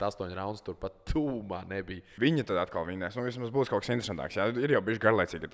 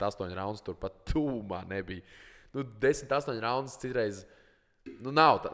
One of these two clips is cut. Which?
first; 1 cut; at 2.0 s

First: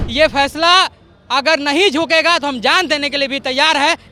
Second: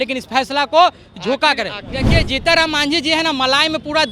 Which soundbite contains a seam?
second; 1 cut; at 1.9 s

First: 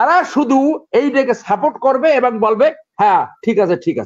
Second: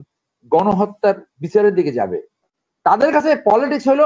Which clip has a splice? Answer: second; 1 cut; at 2.6 s

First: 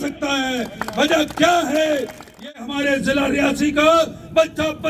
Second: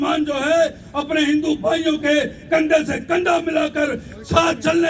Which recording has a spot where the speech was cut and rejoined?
first; 1 cut; at 2.3 s

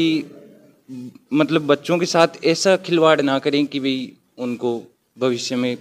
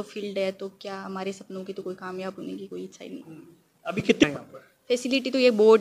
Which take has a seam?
second; 1 cut; at 4.2 s

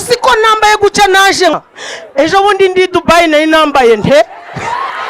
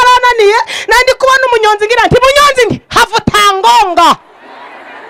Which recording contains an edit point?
first; 1 cut; at 1.5 s

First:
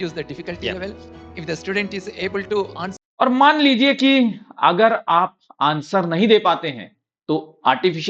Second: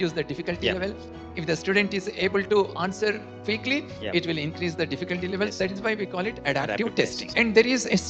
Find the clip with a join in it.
second; 1 cut; at 2.9 s

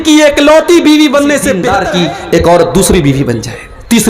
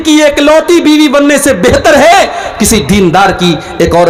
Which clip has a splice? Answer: first; 1 cut; at 1.7 s

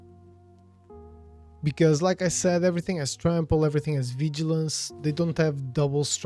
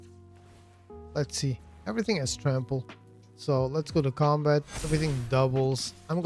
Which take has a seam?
second; 1 cut; at 1.1 s

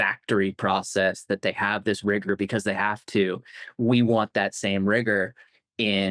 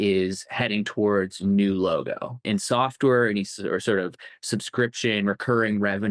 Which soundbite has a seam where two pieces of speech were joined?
second; 1 cut; at 2.4 s

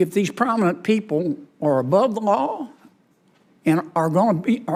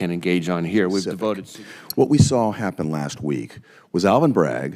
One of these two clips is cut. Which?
second; 1 cut; at 1.5 s

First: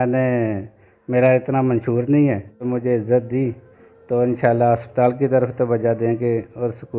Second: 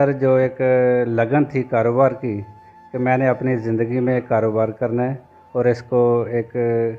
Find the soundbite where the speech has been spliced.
first; 1 cut; at 2.6 s

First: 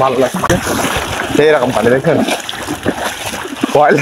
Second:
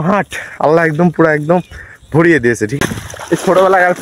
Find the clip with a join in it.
second; 1 cut; at 2.7 s

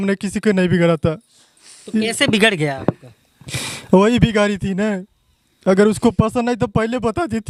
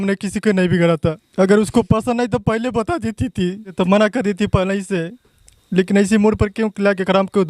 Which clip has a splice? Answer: second; 2 cuts; at 1.2 s, 3.7 s

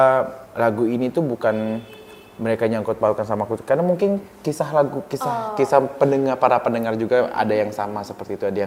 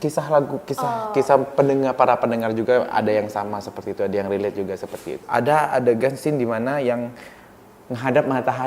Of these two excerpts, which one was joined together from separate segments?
second; 1 cut; at 5.2 s

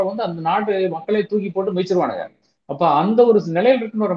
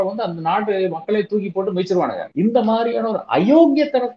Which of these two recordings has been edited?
second; 1 cut; at 2.2 s

